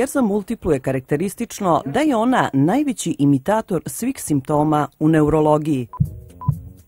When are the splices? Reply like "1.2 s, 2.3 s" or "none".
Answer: 5.9 s